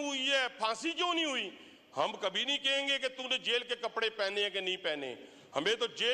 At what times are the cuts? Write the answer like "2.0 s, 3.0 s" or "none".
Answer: none